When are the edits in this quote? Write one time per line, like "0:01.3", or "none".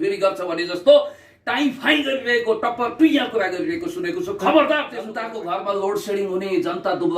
0:05.2